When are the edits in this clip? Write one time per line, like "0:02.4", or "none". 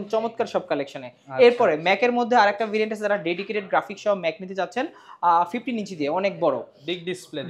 none